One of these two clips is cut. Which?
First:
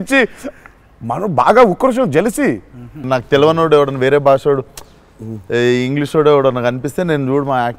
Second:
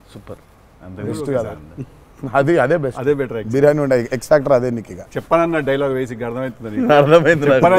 first; 1 cut; at 3.0 s

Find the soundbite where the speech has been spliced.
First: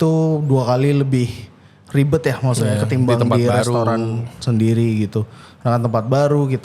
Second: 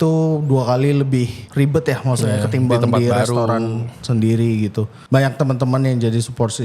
second; 2 cuts; at 1.4 s, 4.9 s

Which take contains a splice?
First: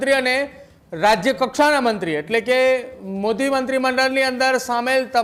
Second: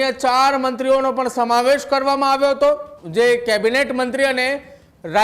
second; 1 cut; at 2.9 s

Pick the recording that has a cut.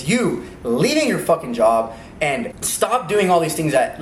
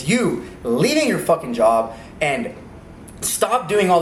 first; 1 cut; at 2.6 s

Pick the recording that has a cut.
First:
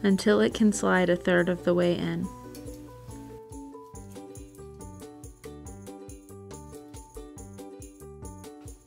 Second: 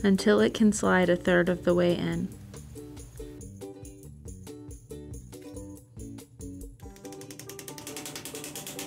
first; 1 cut; at 2.3 s

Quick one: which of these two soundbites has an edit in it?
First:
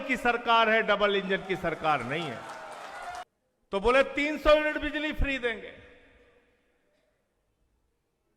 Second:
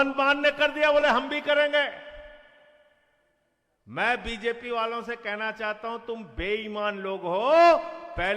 first; 1 cut; at 3.2 s

